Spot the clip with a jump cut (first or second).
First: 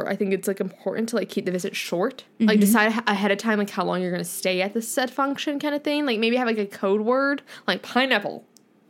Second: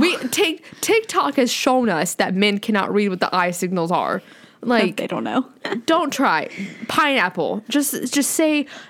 first